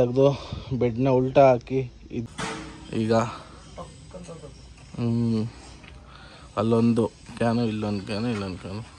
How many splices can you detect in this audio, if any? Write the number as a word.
one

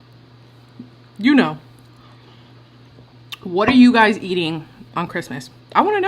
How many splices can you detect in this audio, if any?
one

